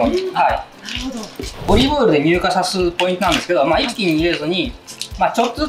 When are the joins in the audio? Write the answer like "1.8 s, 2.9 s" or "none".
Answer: 1.7 s